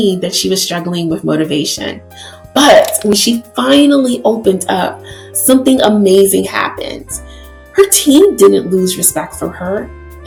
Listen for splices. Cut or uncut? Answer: uncut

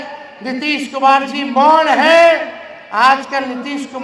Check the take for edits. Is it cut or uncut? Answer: uncut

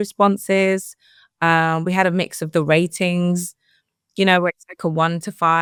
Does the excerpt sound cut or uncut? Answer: uncut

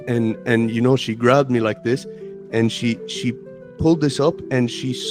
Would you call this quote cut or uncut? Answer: uncut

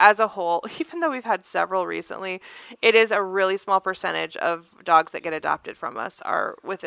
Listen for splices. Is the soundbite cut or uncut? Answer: uncut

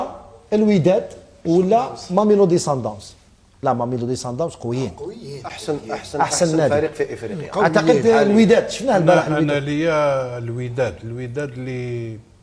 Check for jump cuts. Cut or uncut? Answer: uncut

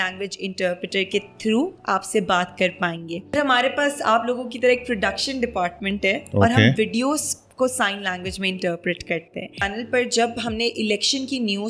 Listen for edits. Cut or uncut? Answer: cut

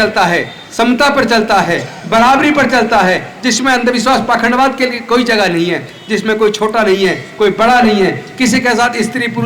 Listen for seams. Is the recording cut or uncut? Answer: uncut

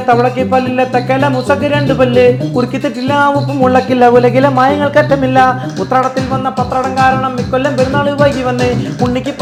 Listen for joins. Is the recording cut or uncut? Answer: uncut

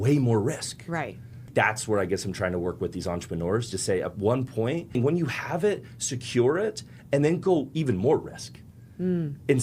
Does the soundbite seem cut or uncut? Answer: cut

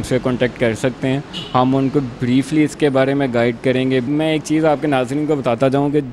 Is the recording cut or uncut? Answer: cut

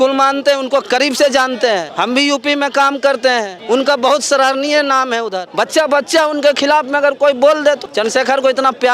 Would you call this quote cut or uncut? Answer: cut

